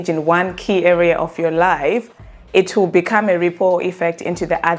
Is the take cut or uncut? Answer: uncut